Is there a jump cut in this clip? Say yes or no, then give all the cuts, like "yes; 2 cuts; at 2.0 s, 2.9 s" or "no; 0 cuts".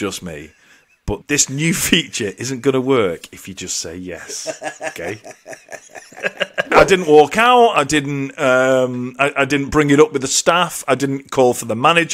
yes; 2 cuts; at 1.2 s, 6.7 s